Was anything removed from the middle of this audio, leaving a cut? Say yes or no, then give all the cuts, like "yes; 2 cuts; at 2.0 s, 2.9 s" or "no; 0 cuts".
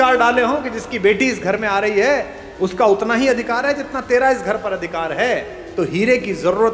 no; 0 cuts